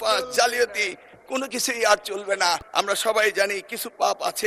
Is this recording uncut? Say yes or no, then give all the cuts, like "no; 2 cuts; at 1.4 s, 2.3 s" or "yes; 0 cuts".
no; 1 cut; at 2.6 s